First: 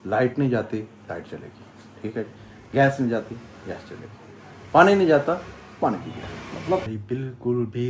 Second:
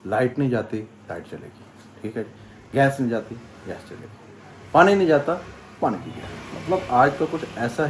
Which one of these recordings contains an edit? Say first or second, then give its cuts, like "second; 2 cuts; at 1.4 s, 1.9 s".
first; 1 cut; at 6.9 s